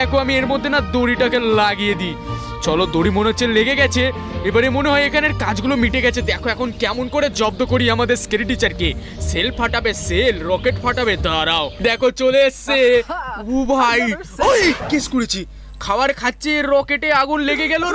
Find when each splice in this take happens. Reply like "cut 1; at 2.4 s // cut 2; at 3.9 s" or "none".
cut 1; at 11.8 s